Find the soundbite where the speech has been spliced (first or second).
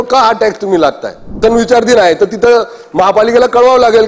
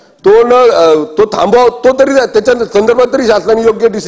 first